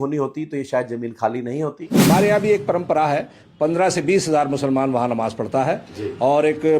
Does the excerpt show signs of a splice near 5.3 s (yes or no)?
no